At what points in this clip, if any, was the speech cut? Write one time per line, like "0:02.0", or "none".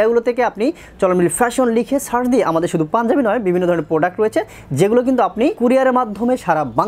none